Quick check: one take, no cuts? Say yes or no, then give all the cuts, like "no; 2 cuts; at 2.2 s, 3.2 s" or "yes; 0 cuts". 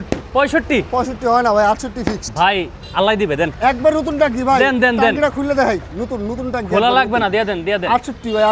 yes; 0 cuts